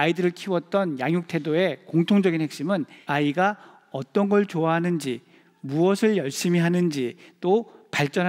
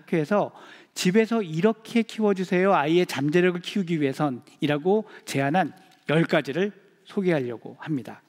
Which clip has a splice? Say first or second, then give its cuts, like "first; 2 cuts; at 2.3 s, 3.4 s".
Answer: first; 1 cut; at 3.0 s